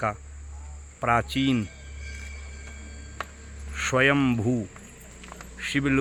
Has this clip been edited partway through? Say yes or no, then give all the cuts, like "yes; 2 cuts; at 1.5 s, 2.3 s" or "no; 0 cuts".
no; 0 cuts